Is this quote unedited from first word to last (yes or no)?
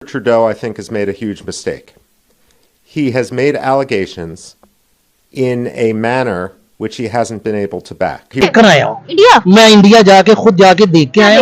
yes